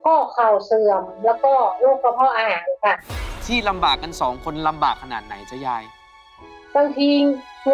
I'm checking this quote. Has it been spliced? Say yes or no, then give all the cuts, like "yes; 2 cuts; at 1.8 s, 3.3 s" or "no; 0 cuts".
yes; 1 cut; at 3.3 s